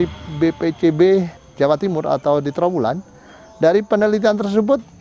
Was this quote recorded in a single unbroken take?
no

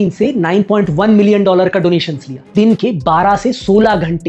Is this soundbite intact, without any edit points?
no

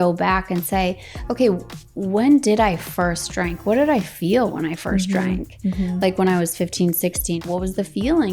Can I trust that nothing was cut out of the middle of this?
no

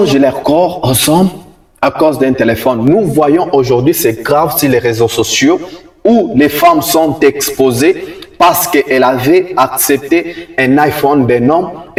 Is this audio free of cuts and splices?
yes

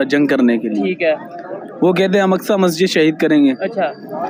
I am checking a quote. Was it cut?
no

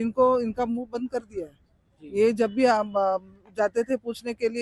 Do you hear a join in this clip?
no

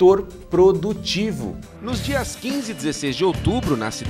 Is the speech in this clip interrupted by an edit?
yes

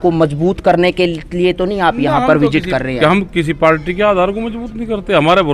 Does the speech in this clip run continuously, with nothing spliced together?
yes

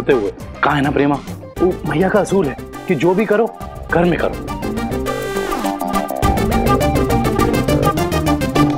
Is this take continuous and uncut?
yes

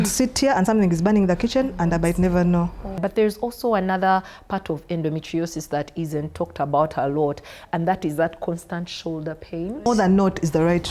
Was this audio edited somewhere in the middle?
yes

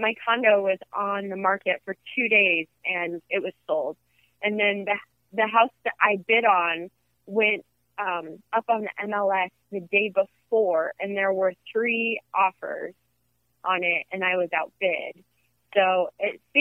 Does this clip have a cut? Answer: no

